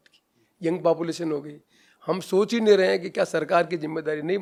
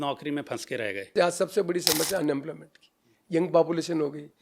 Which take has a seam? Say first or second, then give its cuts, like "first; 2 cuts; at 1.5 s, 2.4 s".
second; 1 cut; at 1.0 s